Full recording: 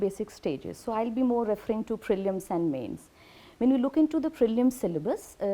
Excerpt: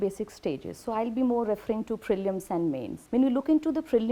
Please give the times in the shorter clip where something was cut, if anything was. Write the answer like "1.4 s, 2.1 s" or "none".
2.9 s

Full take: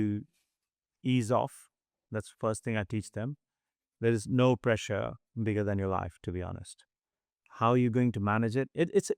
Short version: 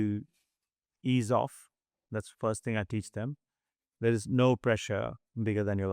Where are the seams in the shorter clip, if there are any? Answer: none

